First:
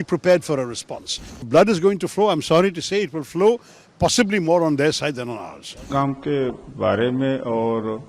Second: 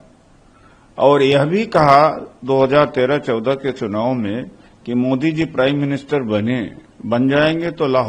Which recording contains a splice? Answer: first; 2 cuts; at 1.5 s, 5.9 s

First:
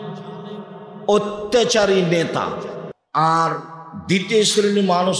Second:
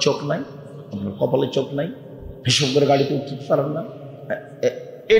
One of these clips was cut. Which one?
first; 1 cut; at 2.9 s

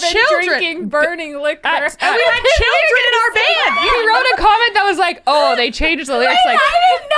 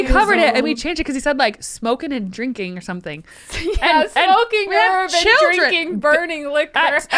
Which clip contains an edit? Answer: first; 1 cut; at 3.7 s

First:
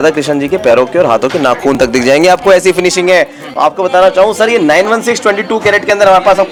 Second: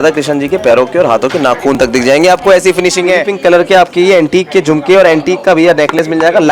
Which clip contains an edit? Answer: second; 1 cut; at 3.3 s

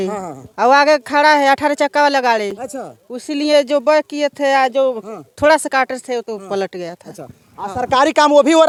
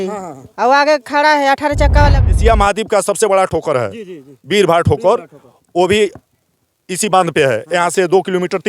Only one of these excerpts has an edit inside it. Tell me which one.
second; 1 cut; at 2.2 s

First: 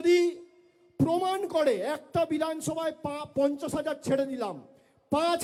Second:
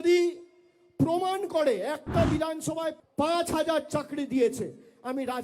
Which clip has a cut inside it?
second; 1 cut; at 3.0 s

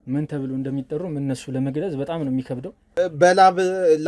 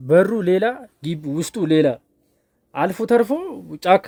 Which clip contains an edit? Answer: first; 1 cut; at 2.8 s

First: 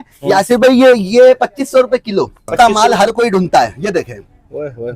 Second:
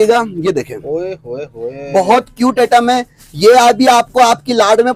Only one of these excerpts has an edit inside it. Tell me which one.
first; 1 cut; at 2.5 s

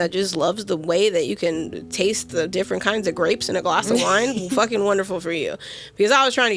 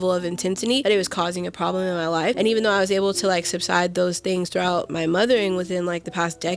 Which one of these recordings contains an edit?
second; 3 cuts; at 0.8 s, 2.4 s, 4.9 s

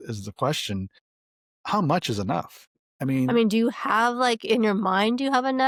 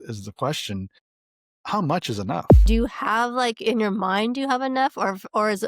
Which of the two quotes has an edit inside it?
second; 1 cut; at 2.7 s

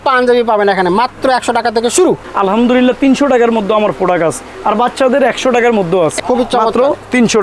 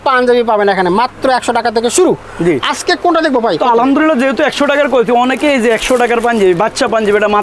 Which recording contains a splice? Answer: first; 2 cuts; at 2.3 s, 6.2 s

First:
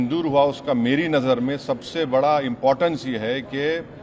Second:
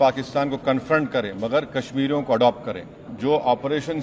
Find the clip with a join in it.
second; 1 cut; at 3.1 s

